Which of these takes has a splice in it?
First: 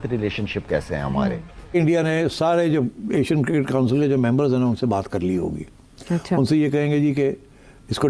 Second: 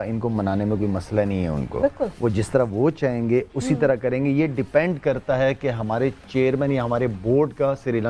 first; 1 cut; at 1.7 s

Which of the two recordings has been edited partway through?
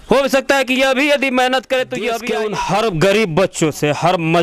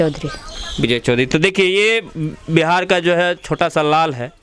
first; 1 cut; at 2.2 s

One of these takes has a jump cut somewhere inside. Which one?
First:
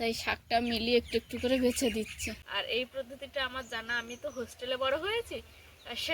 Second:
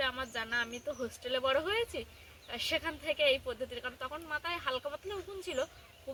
first; 1 cut; at 2.4 s

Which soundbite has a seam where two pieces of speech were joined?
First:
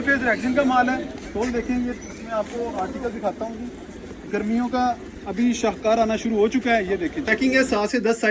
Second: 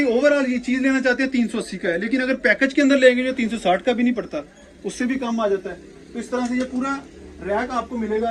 first; 1 cut; at 7.3 s

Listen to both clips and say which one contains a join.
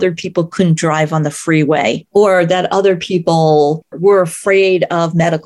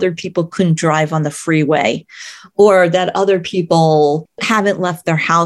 first; 2 cuts; at 2.0 s, 4.0 s

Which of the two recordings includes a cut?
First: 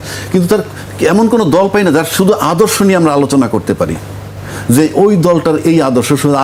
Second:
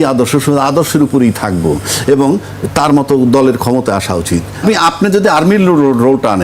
second; 1 cut; at 4.5 s

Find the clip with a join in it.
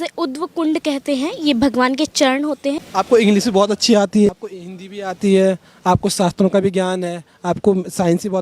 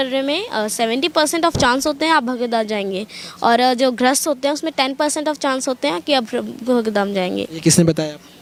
first; 2 cuts; at 2.8 s, 4.3 s

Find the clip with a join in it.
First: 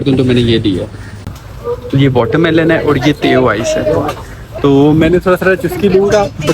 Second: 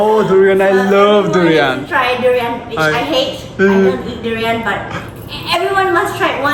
first; 1 cut; at 1.3 s

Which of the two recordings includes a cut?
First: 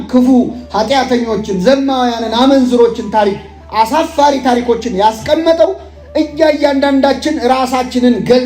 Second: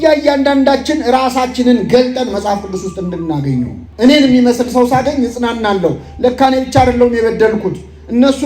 second; 1 cut; at 3.8 s

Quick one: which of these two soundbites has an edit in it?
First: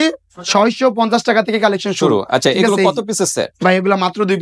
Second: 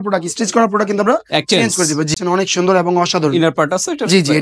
second; 1 cut; at 2.2 s

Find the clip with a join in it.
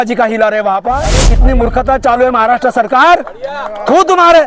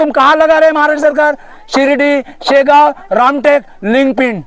first; 1 cut; at 1.2 s

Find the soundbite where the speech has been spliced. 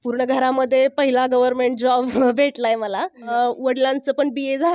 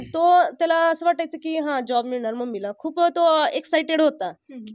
first; 1 cut; at 3.3 s

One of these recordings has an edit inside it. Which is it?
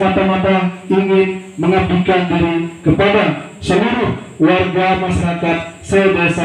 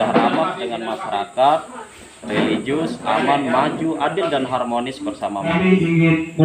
second; 1 cut; at 5.5 s

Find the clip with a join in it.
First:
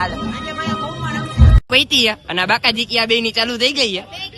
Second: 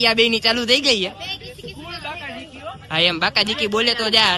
first; 1 cut; at 1.6 s

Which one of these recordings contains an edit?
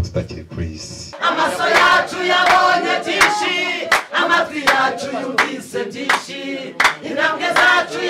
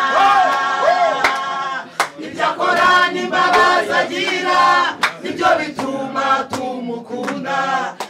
first; 1 cut; at 1.2 s

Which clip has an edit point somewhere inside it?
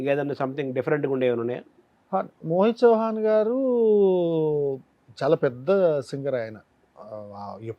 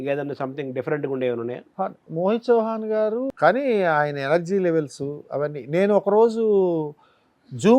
second; 2 cuts; at 1.6 s, 3.3 s

